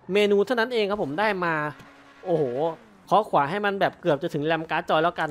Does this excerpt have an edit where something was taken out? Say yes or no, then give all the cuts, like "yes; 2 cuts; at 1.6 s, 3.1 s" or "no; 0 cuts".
yes; 1 cut; at 2.9 s